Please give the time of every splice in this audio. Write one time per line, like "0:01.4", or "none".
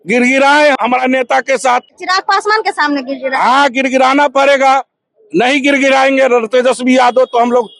0:00.8
0:02.0